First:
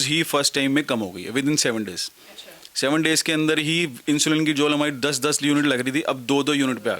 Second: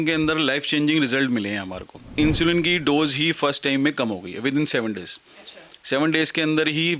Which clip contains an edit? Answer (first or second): second